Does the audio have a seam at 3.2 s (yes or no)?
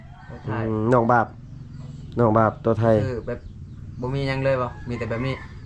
no